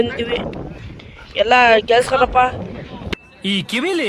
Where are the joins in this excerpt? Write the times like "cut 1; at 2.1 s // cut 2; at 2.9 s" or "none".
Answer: none